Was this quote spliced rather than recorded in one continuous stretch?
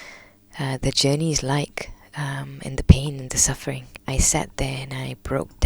yes; 1 cut; at 3.9 s

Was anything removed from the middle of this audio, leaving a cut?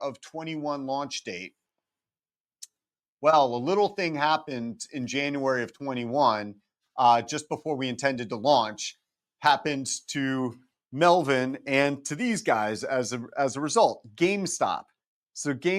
no; 0 cuts

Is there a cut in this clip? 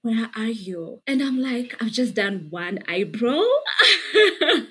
no; 0 cuts

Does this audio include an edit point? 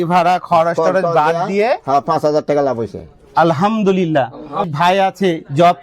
yes; 1 cut; at 4.7 s

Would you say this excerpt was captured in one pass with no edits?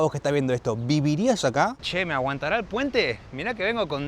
no; 1 cut; at 1.7 s

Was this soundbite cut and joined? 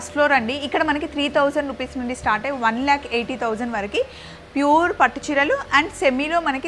no; 0 cuts

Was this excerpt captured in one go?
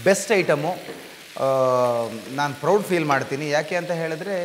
yes; 0 cuts

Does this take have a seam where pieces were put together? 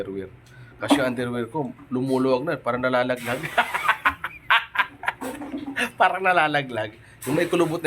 no; 0 cuts

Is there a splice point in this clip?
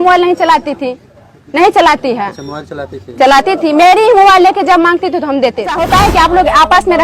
yes; 1 cut; at 5.8 s

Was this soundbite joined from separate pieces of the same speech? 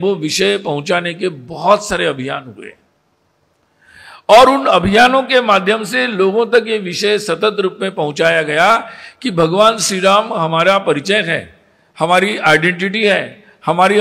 no; 0 cuts

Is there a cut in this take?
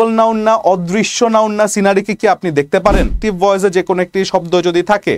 yes; 1 cut; at 3.2 s

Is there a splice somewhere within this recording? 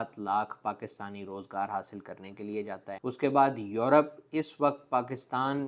no; 0 cuts

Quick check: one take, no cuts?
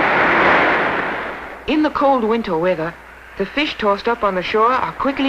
yes; 0 cuts

